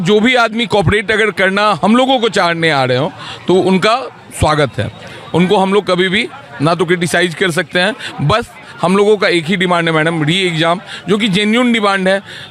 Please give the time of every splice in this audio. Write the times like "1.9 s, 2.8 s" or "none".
none

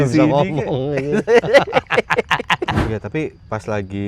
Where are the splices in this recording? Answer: 2.8 s

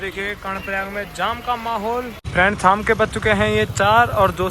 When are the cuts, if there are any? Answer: 2.2 s

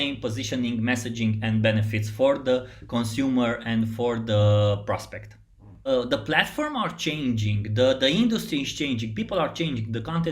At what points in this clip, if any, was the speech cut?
5.9 s

